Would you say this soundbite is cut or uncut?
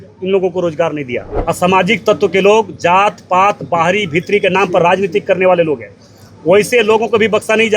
cut